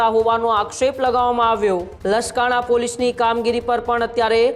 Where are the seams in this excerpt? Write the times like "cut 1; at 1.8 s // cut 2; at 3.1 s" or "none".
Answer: cut 1; at 1.9 s